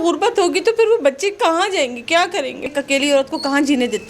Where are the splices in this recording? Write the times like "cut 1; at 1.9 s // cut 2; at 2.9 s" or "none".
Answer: cut 1; at 2.6 s